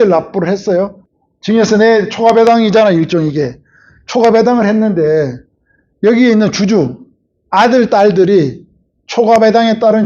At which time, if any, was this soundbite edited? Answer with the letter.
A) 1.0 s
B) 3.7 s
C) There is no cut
A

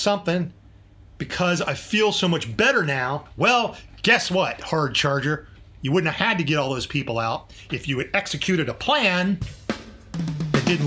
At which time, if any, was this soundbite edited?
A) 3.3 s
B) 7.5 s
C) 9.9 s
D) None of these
A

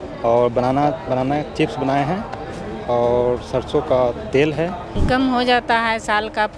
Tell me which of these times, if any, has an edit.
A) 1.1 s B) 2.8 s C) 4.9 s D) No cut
C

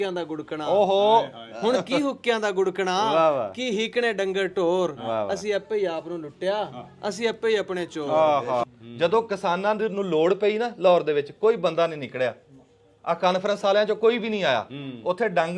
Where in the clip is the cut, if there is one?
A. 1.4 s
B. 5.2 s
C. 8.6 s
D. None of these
C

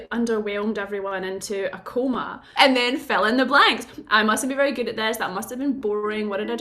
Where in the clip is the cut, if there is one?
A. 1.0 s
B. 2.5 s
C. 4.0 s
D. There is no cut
B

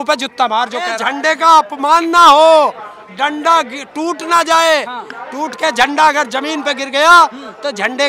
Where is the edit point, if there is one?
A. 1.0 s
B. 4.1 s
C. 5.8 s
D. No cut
A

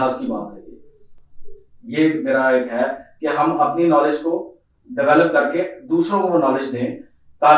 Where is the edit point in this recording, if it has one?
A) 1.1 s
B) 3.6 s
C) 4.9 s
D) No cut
D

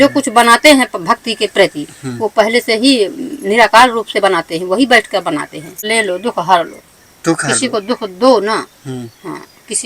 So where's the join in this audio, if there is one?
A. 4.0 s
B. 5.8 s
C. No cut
B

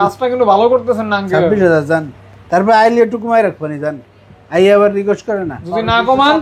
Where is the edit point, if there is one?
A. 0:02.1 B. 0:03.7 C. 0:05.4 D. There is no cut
D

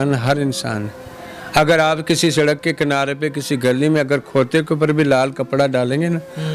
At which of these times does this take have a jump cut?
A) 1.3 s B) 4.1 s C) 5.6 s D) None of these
D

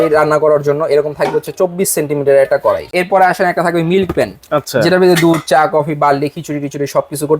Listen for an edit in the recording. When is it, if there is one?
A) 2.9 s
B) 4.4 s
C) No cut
A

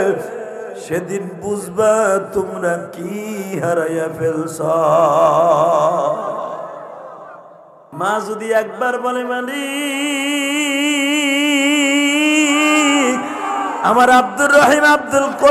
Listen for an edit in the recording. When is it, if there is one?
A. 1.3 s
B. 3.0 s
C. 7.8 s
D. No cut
C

